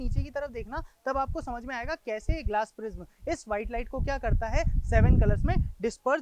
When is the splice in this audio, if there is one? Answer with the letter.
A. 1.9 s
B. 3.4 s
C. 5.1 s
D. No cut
D